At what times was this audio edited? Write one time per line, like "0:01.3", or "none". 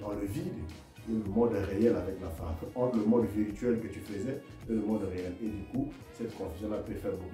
none